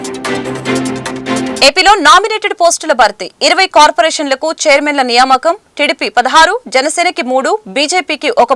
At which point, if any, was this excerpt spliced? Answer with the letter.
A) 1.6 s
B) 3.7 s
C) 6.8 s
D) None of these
A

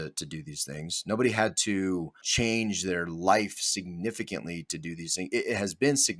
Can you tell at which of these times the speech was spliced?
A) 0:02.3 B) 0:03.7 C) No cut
A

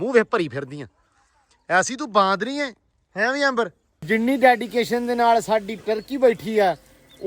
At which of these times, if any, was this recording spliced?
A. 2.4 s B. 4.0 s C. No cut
B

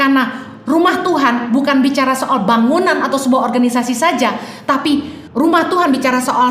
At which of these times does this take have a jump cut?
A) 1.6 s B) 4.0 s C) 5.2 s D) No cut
C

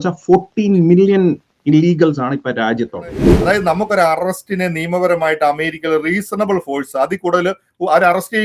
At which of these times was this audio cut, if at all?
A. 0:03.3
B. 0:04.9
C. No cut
A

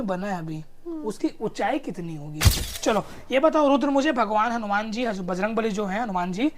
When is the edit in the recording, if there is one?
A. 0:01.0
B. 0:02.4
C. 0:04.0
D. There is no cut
B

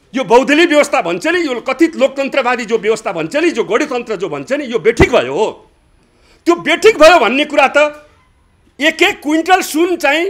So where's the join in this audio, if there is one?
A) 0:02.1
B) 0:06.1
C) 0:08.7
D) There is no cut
D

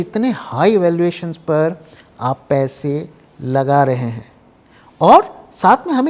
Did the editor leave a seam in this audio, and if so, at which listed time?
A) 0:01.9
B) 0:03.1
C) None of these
C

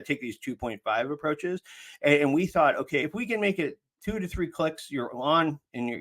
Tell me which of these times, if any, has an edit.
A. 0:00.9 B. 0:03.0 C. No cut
B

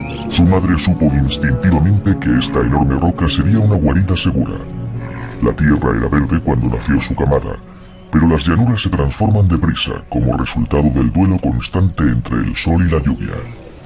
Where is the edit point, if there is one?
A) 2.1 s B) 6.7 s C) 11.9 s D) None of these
D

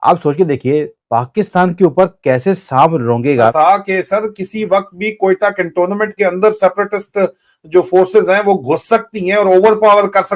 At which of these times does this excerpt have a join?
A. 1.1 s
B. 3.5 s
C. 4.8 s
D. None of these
B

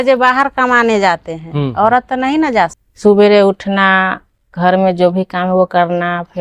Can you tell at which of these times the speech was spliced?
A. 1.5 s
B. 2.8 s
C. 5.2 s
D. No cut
B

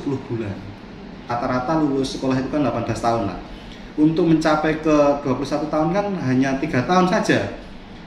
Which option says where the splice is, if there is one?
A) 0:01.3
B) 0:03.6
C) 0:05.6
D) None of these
A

